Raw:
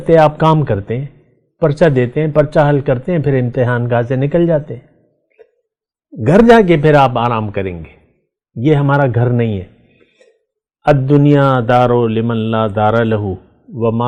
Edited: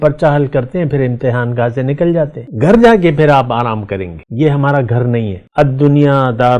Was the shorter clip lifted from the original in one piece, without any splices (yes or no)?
no